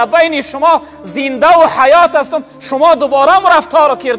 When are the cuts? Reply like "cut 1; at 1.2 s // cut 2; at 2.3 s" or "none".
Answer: none